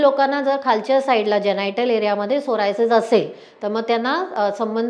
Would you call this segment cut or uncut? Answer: uncut